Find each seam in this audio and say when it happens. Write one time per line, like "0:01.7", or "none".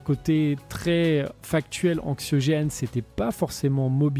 none

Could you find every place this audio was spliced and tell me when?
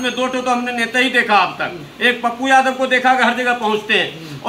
none

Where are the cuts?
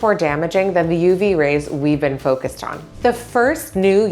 0:02.8

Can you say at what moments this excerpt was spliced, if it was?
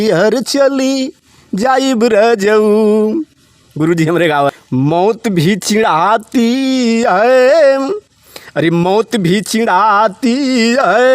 0:04.5

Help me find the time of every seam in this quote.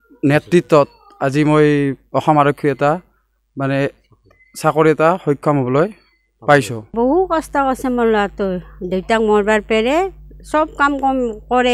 0:06.9

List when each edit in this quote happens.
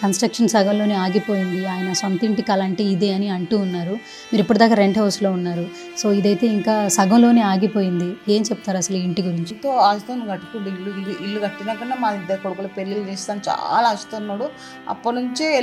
0:09.5

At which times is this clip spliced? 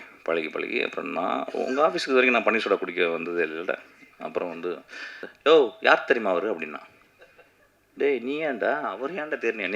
0:05.3

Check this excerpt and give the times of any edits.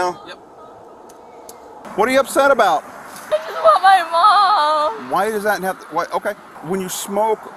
0:01.9
0:03.3
0:06.5

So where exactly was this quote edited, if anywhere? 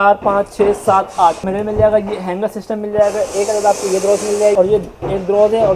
0:01.4
0:04.6

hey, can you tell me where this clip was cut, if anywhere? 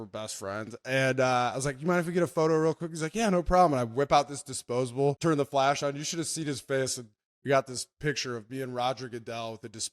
0:05.2

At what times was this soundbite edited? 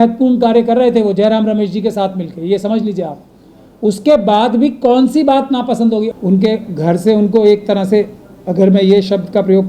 0:06.1

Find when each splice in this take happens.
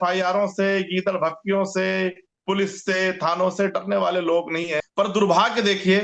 0:04.9

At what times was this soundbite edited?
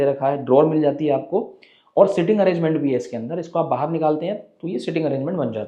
none

